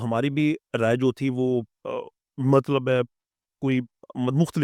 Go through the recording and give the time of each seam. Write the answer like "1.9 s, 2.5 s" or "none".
none